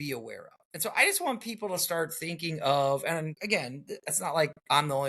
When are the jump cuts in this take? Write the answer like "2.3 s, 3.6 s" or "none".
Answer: 3.3 s